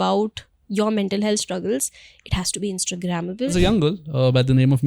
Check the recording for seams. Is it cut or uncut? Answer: cut